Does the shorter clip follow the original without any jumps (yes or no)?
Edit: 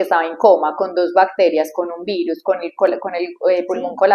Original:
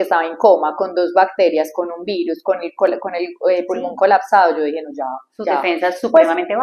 yes